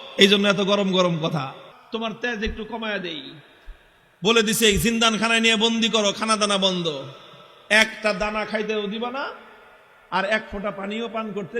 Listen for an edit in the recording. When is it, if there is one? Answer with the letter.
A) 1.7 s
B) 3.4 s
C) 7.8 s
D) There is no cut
A